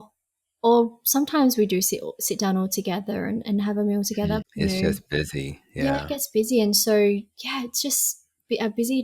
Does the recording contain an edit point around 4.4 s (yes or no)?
yes